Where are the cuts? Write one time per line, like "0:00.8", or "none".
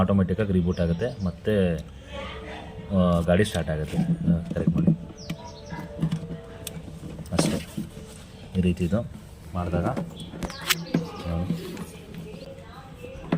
0:12.5